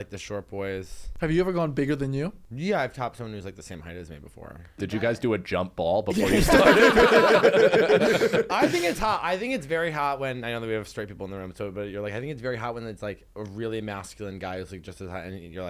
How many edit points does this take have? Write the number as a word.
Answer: three